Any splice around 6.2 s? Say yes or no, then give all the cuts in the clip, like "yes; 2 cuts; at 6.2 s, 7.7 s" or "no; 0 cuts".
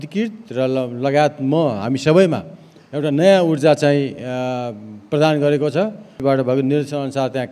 yes; 1 cut; at 6.2 s